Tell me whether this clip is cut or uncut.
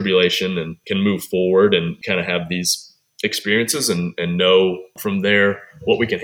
cut